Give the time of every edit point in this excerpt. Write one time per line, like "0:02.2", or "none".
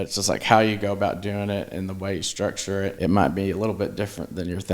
0:03.0